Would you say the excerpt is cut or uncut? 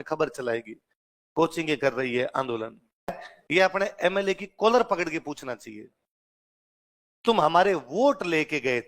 cut